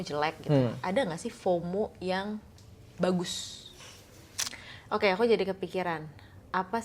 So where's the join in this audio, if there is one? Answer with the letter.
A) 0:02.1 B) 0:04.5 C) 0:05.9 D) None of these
B